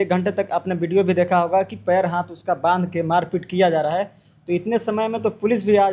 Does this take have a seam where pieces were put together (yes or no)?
no